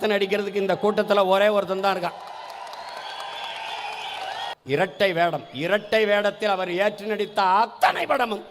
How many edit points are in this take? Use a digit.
1